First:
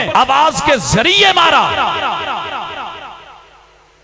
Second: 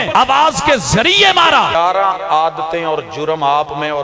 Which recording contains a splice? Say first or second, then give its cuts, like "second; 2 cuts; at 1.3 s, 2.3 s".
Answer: second; 1 cut; at 1.7 s